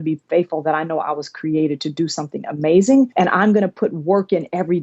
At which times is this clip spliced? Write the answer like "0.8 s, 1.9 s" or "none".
3.1 s